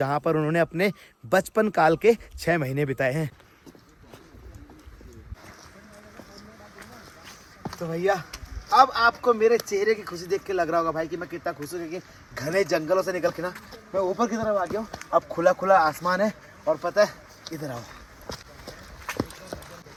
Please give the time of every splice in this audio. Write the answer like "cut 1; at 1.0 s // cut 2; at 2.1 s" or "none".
none